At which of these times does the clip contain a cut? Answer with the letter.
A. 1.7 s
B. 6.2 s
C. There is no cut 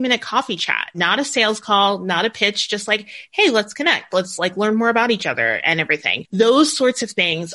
B